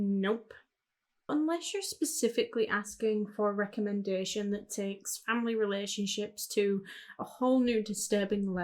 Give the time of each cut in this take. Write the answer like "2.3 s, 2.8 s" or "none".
1.3 s

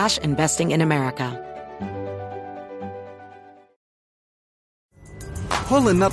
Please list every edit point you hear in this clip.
1.3 s

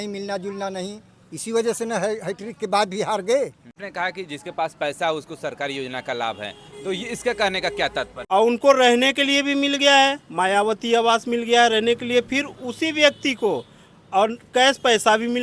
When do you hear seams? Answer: 3.8 s, 8.1 s

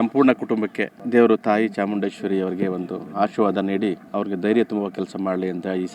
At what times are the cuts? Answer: 4.0 s

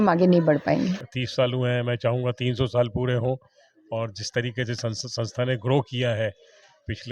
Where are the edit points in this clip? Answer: 1.0 s

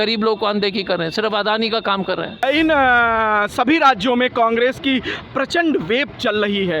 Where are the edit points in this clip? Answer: 2.4 s

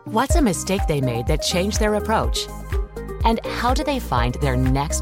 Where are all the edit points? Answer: none

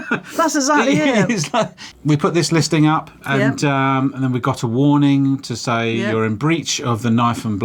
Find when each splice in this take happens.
1.8 s

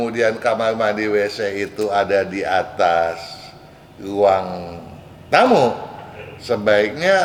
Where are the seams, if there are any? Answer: none

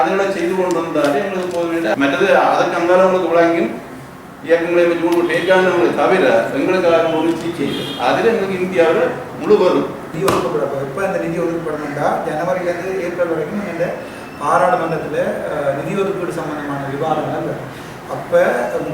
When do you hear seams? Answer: 1.9 s, 10.1 s

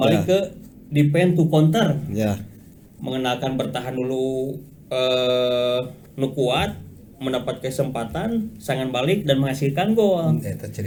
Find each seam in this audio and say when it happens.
none

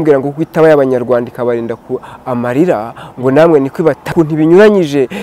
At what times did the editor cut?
4.1 s

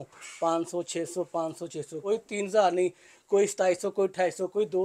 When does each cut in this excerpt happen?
2.0 s

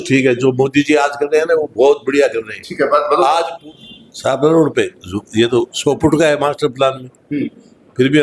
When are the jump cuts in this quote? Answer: 3.6 s

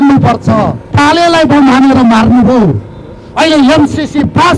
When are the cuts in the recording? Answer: 0.9 s

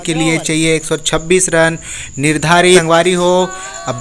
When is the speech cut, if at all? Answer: 2.8 s

